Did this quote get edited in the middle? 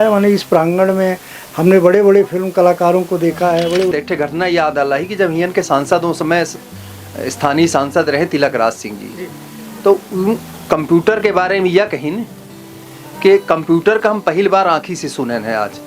yes; 1 cut; at 3.9 s

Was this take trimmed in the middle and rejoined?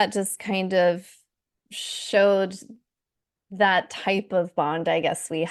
no; 0 cuts

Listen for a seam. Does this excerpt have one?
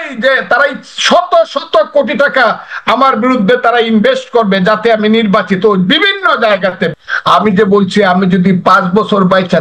yes; 1 cut; at 6.9 s

